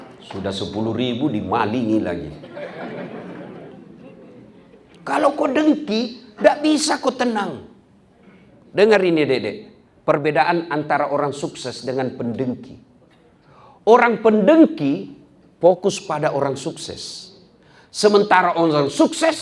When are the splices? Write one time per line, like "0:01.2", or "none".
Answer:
0:03.8